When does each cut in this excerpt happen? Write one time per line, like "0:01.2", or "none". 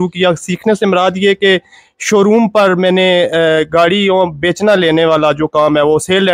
none